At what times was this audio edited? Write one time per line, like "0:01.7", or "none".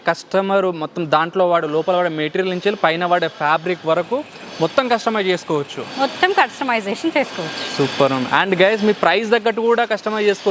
none